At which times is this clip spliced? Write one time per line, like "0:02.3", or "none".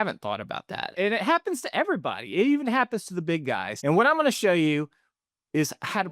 0:00.9
0:03.7